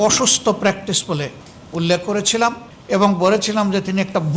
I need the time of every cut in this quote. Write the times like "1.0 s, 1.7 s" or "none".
2.7 s